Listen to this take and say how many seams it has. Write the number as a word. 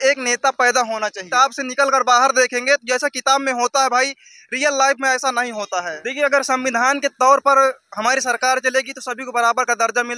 two